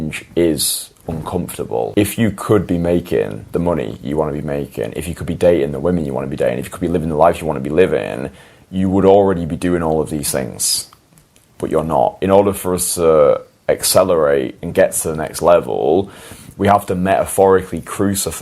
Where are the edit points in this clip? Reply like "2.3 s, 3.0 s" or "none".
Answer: 1.9 s, 12.2 s